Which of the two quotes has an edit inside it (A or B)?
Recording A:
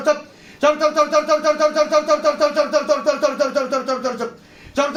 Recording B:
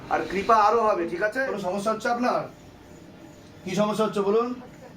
B